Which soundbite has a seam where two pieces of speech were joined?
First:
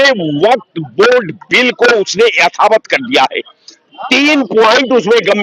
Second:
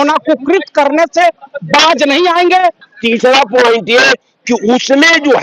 second; 1 cut; at 2.9 s

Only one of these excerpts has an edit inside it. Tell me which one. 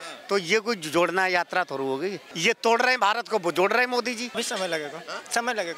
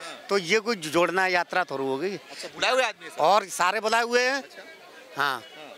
first; 2 cuts; at 2.3 s, 4.3 s

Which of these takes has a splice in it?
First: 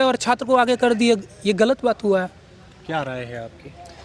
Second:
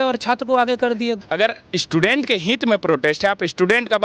second; 1 cut; at 1.2 s

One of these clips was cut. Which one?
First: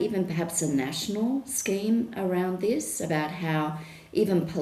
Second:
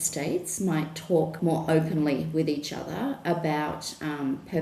second; 1 cut; at 1.4 s

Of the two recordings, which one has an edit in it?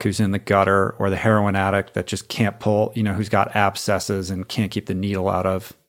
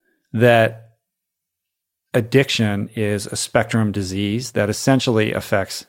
second; 2 cuts; at 2.9 s, 4.4 s

